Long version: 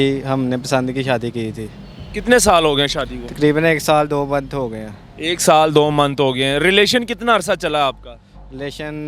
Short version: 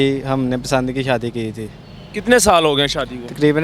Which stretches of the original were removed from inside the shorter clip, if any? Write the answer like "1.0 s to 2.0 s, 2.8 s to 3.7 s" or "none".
none